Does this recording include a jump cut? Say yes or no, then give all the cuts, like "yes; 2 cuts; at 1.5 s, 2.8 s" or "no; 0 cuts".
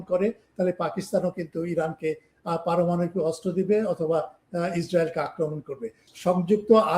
yes; 1 cut; at 6.1 s